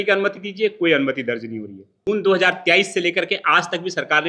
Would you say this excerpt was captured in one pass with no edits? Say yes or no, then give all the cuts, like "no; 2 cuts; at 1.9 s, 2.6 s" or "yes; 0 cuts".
no; 1 cut; at 1.9 s